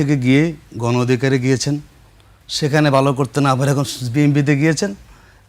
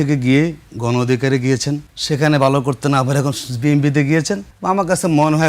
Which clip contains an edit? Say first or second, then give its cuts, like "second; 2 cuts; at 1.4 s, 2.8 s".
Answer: second; 2 cuts; at 1.9 s, 4.5 s